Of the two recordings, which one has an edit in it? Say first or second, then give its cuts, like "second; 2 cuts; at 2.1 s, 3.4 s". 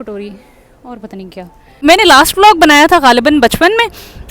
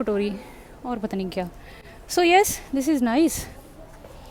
first; 1 cut; at 1.8 s